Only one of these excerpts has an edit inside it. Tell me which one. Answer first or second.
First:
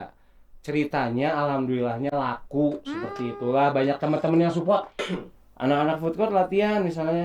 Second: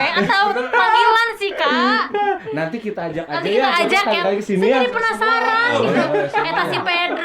first